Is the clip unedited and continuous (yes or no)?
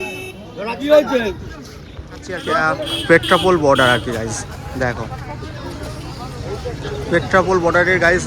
no